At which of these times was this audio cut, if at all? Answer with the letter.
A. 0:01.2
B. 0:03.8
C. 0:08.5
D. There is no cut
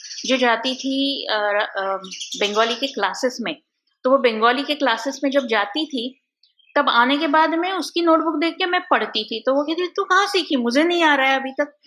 D